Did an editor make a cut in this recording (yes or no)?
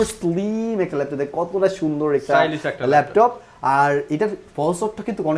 no